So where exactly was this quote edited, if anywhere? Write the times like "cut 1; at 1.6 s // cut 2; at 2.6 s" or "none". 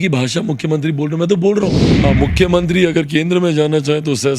cut 1; at 1.9 s